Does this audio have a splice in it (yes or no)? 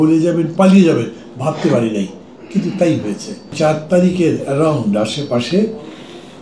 yes